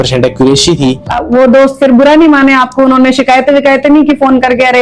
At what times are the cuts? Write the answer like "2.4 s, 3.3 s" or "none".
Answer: 1.1 s